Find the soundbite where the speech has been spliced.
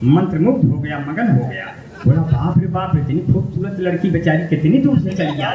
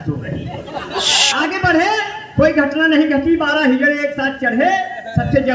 second; 1 cut; at 1.2 s

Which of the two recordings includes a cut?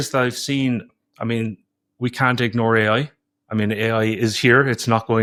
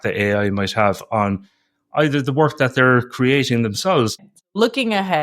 second; 1 cut; at 4.2 s

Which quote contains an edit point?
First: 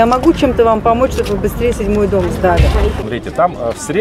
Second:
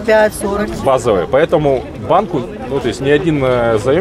first; 1 cut; at 3.0 s

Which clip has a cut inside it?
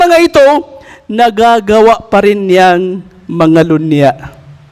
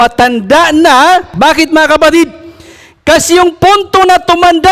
second; 1 cut; at 1.3 s

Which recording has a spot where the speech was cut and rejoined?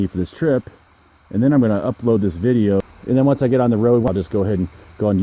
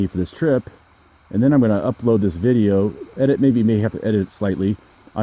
first; 2 cuts; at 2.8 s, 4.1 s

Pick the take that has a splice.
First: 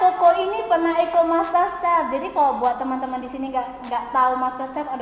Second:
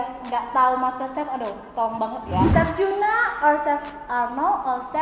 second; 1 cut; at 2.5 s

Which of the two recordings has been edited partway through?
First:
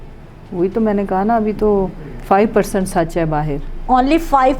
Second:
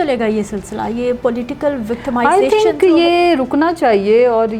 first; 1 cut; at 3.7 s

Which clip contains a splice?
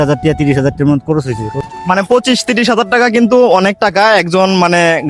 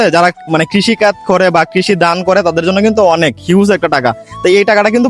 first; 1 cut; at 1.6 s

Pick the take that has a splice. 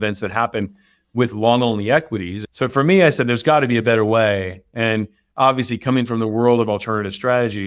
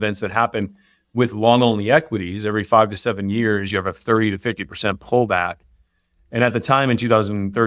first; 1 cut; at 2.4 s

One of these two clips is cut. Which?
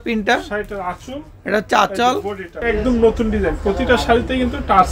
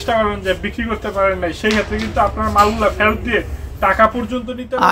first; 1 cut; at 2.5 s

